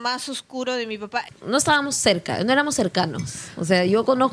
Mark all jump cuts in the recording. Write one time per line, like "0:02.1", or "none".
0:01.3